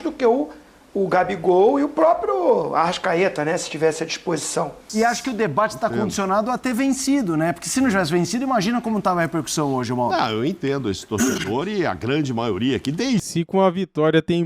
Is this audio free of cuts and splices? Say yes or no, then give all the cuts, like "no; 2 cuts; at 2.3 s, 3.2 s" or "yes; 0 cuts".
no; 1 cut; at 4.8 s